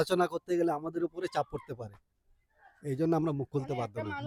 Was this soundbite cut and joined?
no; 0 cuts

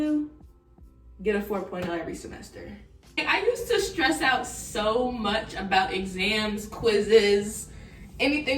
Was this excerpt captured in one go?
no; 1 cut; at 3.2 s

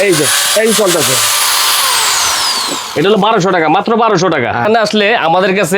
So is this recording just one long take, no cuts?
no; 1 cut; at 4.6 s

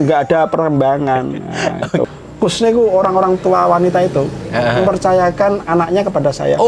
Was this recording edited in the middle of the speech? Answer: yes; 1 cut; at 2.1 s

